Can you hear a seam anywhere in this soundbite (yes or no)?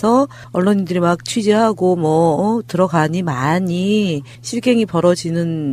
no